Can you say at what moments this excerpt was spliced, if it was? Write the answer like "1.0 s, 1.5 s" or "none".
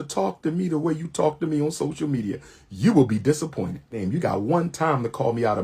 4.0 s